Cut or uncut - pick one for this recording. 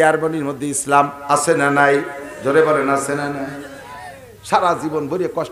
uncut